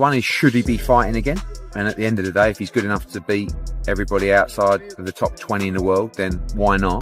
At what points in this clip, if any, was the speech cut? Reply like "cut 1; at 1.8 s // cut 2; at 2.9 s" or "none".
none